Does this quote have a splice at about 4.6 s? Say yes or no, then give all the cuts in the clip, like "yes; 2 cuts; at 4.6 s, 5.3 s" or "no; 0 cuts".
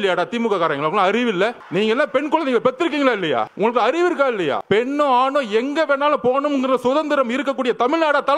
yes; 3 cuts; at 1.6 s, 3.5 s, 4.6 s